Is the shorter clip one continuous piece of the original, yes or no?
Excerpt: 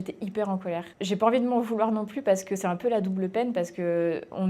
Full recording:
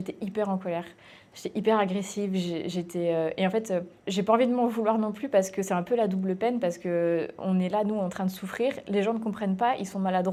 no